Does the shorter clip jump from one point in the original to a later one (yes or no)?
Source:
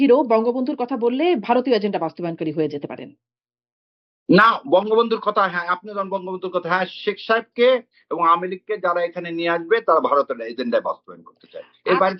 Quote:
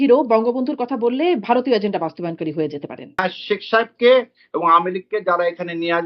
yes